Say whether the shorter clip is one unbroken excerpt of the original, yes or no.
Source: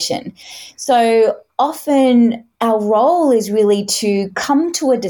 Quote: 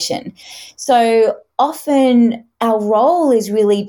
yes